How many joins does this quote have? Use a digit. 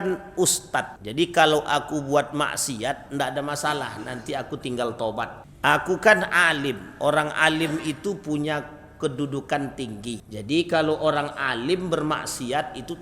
3